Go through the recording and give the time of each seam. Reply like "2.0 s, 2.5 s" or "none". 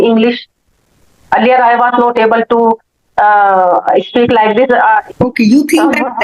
5.0 s